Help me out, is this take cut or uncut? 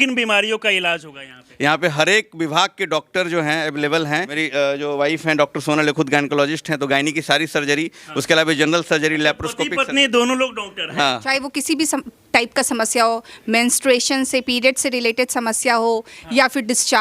cut